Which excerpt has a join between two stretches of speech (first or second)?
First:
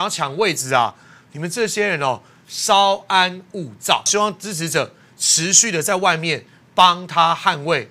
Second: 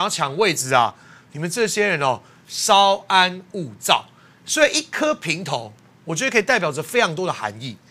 first